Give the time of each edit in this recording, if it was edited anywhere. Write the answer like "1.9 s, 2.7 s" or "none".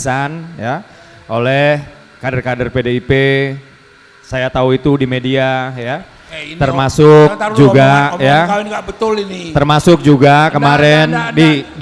none